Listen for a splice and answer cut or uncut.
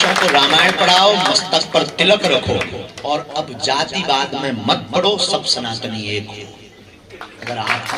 uncut